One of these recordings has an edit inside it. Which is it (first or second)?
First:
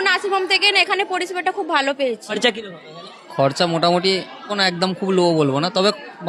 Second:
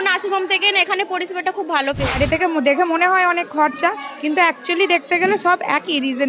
second